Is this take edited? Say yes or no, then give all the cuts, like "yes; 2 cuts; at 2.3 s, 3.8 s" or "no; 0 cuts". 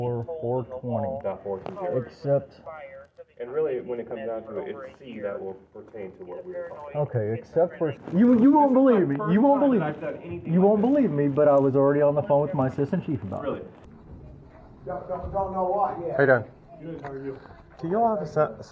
yes; 2 cuts; at 8.0 s, 13.8 s